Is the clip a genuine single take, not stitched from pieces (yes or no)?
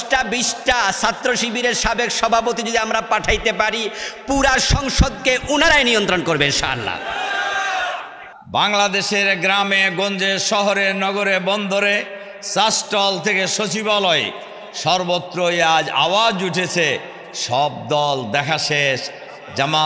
no